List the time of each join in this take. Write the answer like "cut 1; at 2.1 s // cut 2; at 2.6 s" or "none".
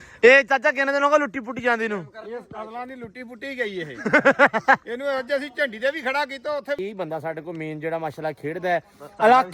cut 1; at 6.8 s